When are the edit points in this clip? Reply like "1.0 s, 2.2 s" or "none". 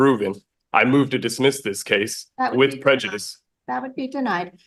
none